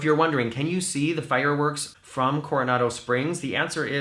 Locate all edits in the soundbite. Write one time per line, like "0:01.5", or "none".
0:01.9